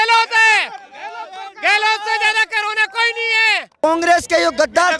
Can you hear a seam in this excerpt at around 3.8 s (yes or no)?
yes